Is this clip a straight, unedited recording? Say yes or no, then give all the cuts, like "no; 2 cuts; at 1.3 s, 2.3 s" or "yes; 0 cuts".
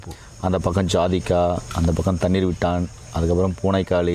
yes; 0 cuts